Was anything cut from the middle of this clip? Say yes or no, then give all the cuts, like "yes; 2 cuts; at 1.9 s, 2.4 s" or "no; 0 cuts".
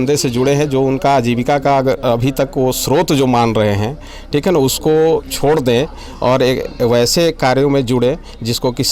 no; 0 cuts